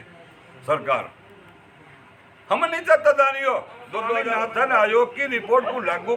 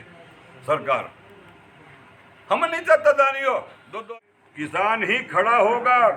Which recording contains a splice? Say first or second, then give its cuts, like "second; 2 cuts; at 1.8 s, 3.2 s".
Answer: second; 1 cut; at 4.0 s